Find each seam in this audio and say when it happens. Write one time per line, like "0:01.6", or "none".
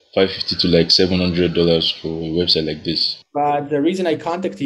0:03.2

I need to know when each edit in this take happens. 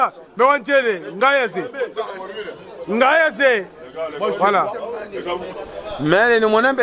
none

